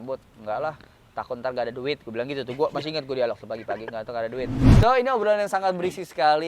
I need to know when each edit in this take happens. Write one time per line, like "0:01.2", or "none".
0:04.6